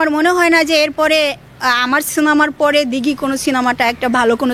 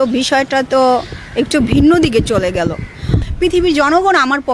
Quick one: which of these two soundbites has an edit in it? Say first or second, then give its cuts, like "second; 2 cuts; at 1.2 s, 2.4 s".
second; 1 cut; at 3.3 s